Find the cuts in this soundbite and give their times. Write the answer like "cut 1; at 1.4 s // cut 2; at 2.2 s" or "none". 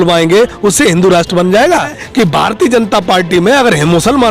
cut 1; at 2.0 s